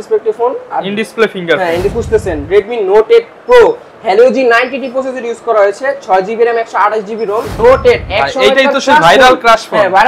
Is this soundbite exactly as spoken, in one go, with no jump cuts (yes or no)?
no